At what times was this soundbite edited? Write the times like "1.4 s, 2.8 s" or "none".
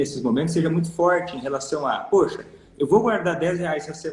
none